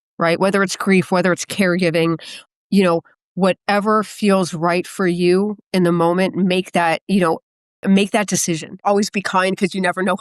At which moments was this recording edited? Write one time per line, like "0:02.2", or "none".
0:08.8